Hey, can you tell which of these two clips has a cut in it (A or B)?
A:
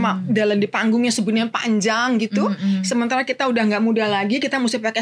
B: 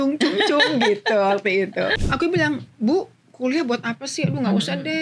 B